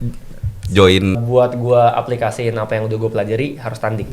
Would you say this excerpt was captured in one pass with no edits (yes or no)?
no